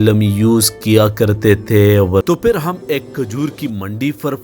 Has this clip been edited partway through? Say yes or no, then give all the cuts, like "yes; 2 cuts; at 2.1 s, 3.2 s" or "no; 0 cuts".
yes; 1 cut; at 2.2 s